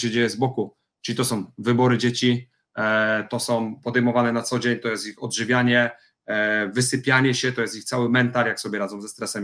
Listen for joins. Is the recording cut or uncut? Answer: uncut